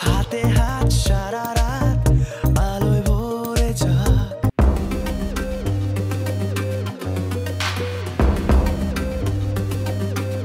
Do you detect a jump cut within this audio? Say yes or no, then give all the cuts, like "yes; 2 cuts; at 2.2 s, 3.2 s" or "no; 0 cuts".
yes; 1 cut; at 4.5 s